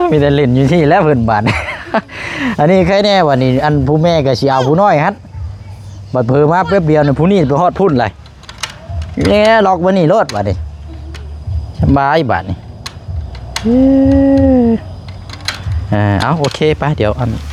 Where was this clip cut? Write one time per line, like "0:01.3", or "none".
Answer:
none